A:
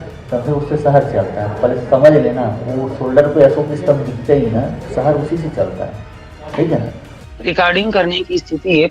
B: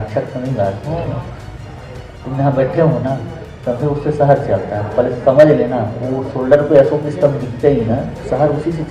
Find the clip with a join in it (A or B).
A